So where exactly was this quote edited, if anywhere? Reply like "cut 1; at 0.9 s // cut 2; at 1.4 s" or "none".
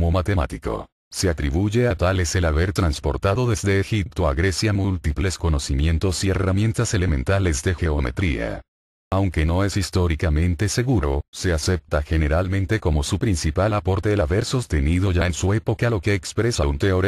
cut 1; at 0.9 s // cut 2; at 5.9 s